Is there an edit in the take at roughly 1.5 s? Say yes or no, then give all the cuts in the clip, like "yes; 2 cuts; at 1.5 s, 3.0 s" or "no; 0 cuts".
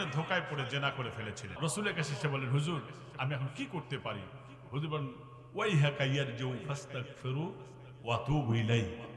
yes; 1 cut; at 1.5 s